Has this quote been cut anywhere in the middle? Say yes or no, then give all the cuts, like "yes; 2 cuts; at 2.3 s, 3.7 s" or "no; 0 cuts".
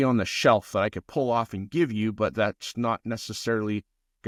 no; 0 cuts